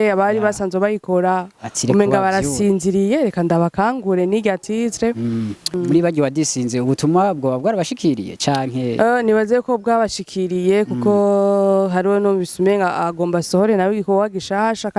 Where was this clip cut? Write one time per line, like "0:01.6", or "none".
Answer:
0:05.7